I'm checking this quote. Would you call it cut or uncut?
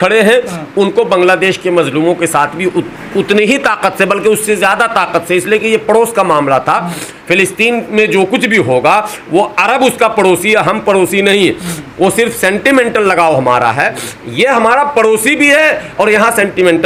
uncut